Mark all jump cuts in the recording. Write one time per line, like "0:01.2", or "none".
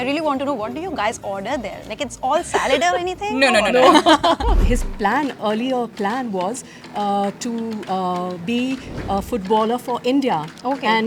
0:04.6

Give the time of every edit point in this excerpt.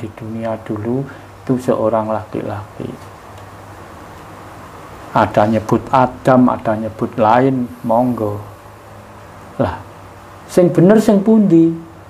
none

